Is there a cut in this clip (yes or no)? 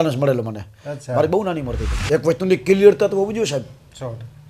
yes